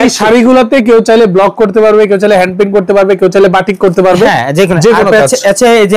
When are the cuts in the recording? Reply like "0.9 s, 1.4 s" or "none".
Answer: none